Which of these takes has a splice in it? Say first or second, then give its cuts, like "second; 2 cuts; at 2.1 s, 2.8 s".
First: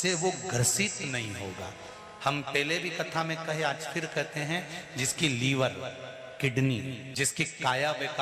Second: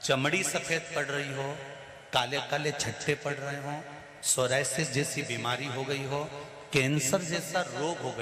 first; 1 cut; at 7.0 s